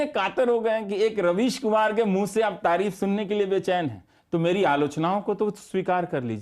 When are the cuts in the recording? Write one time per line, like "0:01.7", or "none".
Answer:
none